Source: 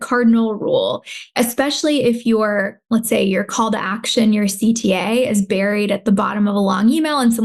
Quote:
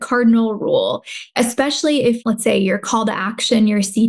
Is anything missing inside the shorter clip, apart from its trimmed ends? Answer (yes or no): yes